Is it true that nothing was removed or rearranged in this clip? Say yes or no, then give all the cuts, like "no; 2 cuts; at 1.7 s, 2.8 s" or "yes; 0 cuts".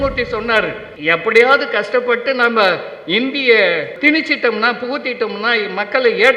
no; 2 cuts; at 0.9 s, 4.0 s